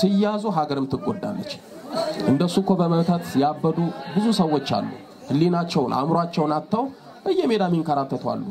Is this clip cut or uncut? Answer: uncut